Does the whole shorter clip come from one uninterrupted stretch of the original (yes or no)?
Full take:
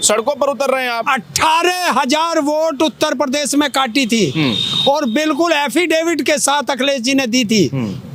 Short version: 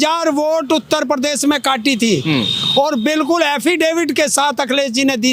yes